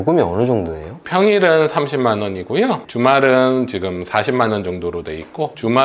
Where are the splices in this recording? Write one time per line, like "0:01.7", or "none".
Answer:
none